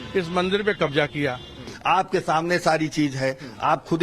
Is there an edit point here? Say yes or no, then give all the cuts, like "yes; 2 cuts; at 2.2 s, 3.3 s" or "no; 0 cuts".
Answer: yes; 1 cut; at 1.6 s